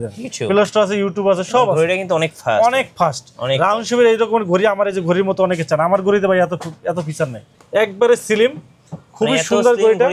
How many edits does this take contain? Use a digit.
1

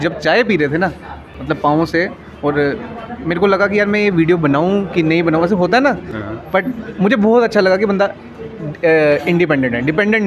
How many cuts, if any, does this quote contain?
0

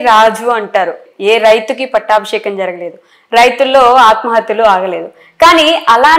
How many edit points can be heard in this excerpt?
1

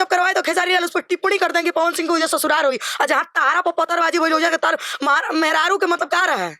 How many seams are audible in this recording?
0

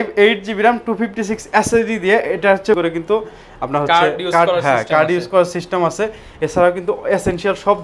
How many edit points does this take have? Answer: 1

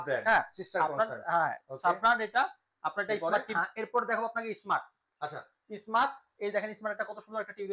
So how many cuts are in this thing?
1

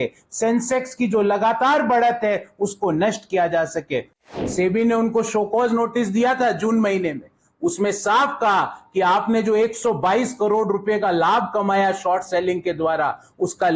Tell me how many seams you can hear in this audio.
1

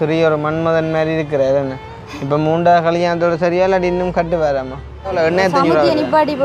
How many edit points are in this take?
1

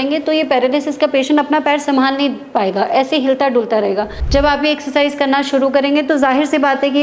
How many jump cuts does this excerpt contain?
1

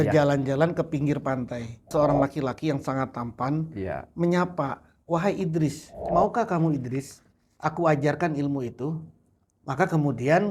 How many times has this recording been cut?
2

